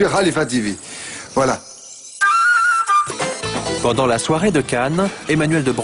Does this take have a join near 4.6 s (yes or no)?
no